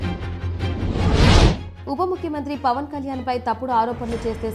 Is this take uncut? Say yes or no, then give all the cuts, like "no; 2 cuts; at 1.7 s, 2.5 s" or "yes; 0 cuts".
no; 1 cut; at 1.7 s